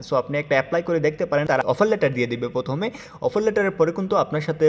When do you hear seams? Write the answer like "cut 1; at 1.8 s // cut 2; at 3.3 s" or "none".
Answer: cut 1; at 1.4 s

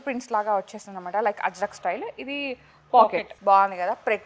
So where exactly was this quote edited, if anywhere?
cut 1; at 3.3 s

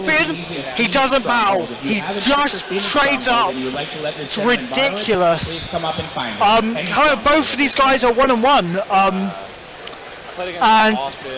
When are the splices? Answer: cut 1; at 2.4 s

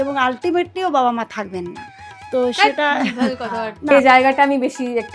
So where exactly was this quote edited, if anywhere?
cut 1; at 3.8 s

